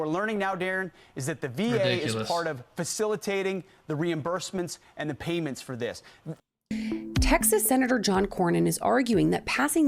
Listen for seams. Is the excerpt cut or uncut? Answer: cut